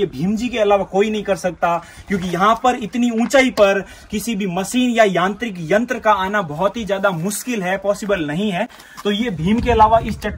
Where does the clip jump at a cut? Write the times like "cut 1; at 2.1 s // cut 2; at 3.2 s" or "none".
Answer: none